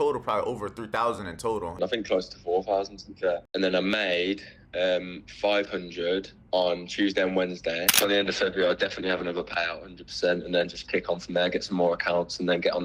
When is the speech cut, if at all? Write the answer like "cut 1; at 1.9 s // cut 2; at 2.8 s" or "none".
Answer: cut 1; at 1.7 s // cut 2; at 3.5 s // cut 3; at 7.9 s